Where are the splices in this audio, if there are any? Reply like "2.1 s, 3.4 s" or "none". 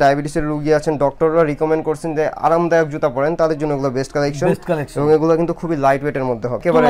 none